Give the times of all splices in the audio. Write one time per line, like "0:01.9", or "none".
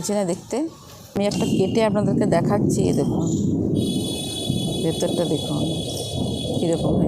0:01.2